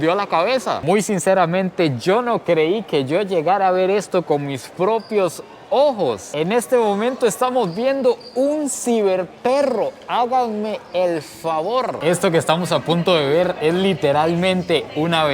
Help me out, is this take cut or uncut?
cut